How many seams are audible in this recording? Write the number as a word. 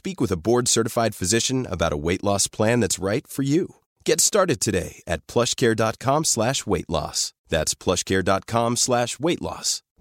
zero